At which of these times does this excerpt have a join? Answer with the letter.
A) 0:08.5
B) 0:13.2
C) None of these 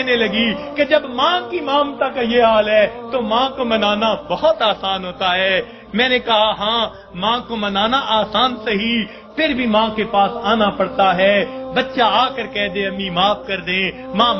A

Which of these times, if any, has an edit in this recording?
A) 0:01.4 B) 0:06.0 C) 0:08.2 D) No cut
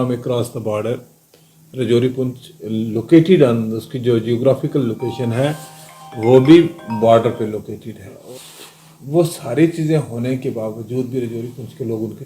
C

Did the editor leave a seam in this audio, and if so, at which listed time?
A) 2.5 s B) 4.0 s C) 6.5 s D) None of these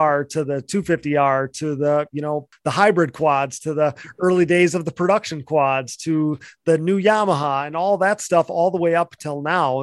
A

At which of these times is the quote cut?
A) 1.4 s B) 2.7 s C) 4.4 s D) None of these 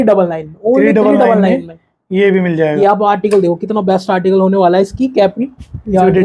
B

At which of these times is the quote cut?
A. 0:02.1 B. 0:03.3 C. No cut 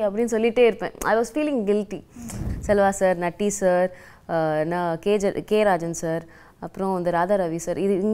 A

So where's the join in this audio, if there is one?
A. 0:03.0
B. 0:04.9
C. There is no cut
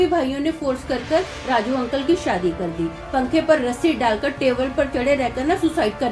A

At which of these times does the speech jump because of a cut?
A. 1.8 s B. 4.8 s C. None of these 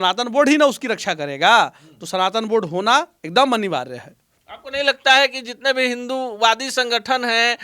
C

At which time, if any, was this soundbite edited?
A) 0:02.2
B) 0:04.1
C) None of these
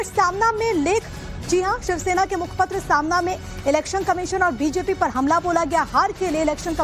A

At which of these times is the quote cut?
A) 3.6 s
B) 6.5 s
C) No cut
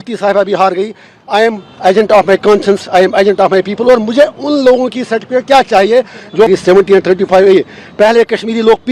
B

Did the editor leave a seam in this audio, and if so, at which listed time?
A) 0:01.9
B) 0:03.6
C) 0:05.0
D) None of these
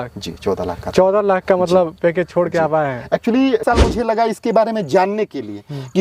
B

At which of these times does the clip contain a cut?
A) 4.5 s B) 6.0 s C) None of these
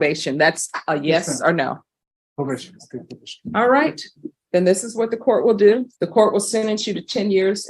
B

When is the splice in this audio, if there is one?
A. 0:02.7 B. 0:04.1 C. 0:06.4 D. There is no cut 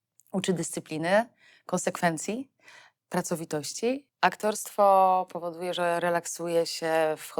B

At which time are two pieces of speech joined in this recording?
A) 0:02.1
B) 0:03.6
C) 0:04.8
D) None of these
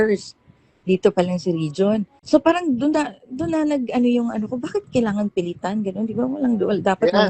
A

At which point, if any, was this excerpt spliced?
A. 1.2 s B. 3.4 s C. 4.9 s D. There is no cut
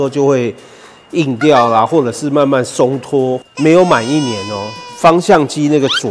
B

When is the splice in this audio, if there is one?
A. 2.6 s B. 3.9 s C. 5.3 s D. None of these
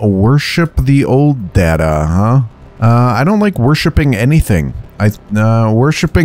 A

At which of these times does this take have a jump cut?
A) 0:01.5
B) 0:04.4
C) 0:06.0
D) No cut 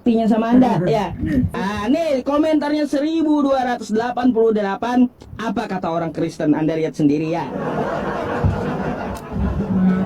A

